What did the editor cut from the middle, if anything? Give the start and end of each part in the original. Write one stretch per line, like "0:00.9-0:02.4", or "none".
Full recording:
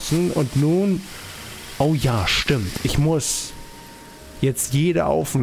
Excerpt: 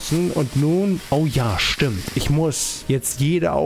0:01.0-0:01.7
0:03.4-0:04.2

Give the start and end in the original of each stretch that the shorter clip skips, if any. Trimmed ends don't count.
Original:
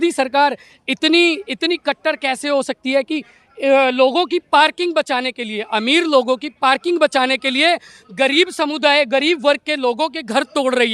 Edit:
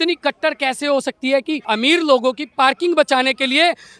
0:03.3-0:05.7

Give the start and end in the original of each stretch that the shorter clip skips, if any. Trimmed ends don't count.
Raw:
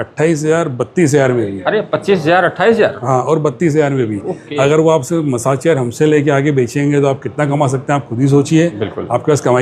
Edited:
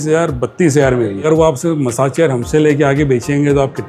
0:01.6-0:04.7

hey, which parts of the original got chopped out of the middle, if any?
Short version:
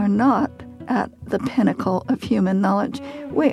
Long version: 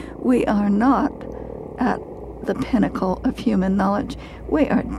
0:01.6-0:02.1

